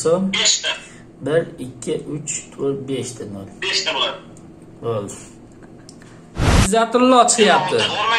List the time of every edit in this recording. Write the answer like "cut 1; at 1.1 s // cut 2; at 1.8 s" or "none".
cut 1; at 6.7 s

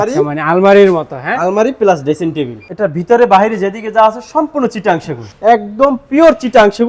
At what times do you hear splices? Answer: cut 1; at 2.6 s // cut 2; at 5.2 s

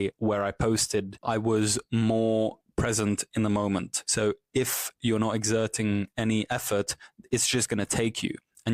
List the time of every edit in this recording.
cut 1; at 1.2 s // cut 2; at 4.0 s

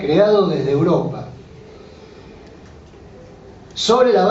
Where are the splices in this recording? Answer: cut 1; at 2.7 s

